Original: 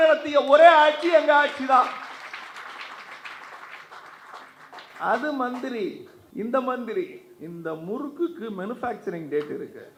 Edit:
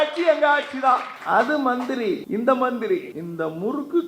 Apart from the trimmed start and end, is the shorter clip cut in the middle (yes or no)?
yes